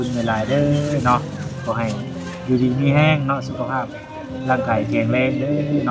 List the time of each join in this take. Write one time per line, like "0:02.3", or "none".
none